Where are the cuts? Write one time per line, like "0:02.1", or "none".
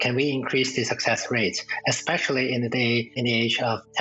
none